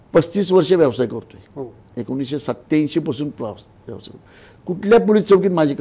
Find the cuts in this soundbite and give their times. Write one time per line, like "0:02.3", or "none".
none